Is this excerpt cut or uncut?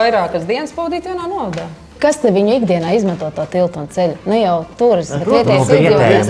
cut